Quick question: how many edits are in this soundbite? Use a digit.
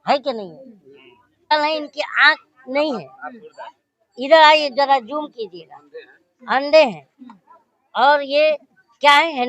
1